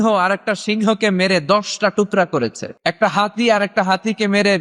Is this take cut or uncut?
cut